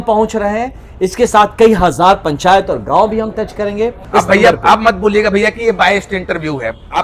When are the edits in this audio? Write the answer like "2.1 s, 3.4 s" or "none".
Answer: 4.0 s